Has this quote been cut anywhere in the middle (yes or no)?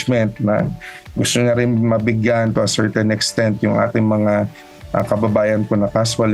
no